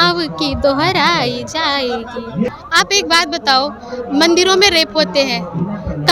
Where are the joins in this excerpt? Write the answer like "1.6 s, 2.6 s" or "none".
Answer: 2.5 s